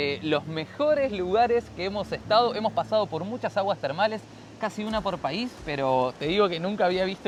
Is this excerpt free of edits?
yes; 0 cuts

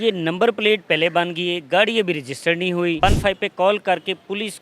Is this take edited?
yes; 1 cut; at 3.0 s

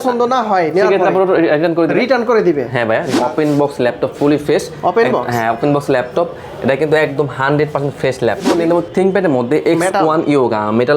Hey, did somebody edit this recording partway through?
yes; 2 cuts; at 3.1 s, 8.5 s

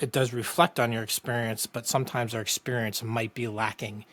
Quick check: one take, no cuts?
yes; 0 cuts

